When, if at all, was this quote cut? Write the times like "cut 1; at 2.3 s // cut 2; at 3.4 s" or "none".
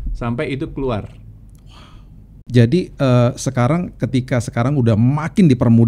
cut 1; at 2.4 s